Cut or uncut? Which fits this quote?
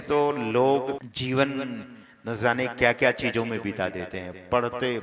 cut